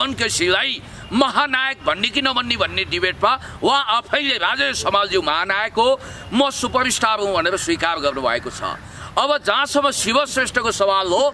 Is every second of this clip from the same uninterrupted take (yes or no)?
yes